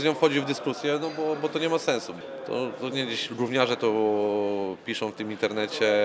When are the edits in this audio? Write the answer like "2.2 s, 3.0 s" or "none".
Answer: 2.1 s